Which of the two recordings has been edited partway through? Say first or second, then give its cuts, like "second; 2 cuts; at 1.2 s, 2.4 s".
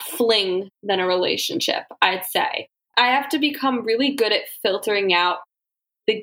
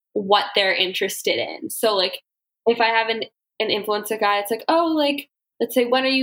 first; 1 cut; at 2.9 s